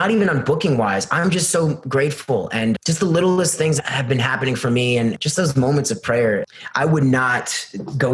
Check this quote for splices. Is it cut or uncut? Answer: cut